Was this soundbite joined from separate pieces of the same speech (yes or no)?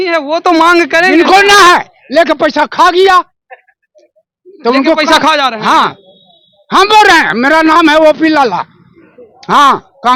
no